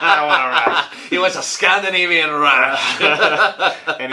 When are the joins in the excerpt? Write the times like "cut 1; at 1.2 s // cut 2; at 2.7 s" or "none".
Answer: none